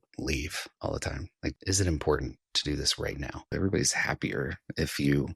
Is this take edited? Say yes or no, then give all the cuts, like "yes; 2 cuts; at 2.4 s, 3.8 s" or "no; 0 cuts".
yes; 2 cuts; at 1.1 s, 3.5 s